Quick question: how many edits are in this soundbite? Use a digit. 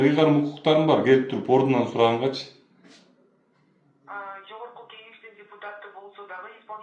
0